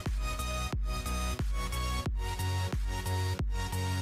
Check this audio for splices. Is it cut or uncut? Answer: uncut